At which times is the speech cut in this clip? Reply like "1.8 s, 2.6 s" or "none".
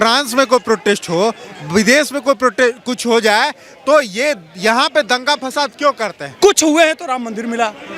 6.2 s